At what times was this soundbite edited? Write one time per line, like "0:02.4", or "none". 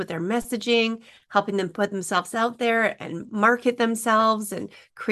none